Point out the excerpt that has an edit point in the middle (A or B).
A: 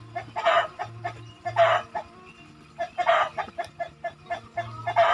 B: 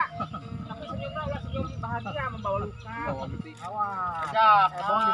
B